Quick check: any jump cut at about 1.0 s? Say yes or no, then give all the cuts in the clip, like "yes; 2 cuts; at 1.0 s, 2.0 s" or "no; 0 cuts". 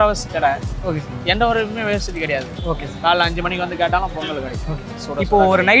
no; 1 cut; at 2.5 s